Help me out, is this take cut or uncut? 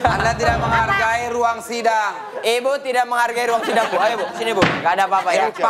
cut